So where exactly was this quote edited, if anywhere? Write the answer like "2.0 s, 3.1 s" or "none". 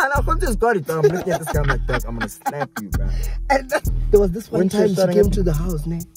4.0 s